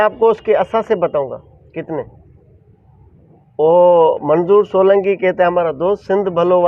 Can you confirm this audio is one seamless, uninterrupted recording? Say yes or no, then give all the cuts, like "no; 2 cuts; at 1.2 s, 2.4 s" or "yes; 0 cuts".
yes; 0 cuts